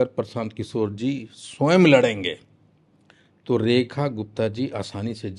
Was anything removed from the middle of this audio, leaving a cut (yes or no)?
no